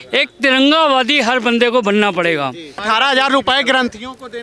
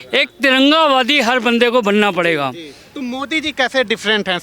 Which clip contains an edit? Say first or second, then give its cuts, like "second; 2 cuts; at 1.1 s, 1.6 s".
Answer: first; 1 cut; at 2.7 s